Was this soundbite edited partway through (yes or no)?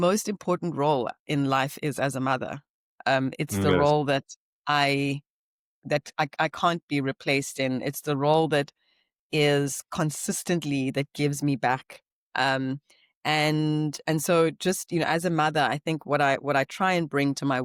no